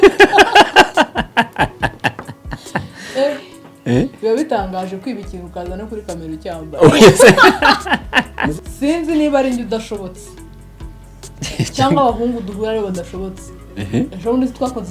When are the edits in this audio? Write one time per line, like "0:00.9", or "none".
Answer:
0:08.6